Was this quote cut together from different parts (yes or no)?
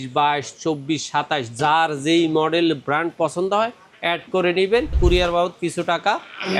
yes